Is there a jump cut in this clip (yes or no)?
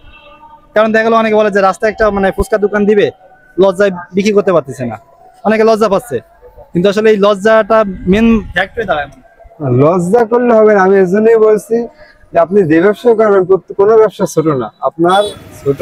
no